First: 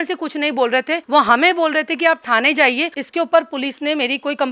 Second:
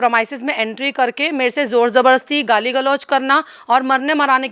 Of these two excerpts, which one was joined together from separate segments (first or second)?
first